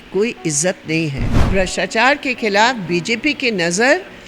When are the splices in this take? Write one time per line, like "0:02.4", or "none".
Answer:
0:01.5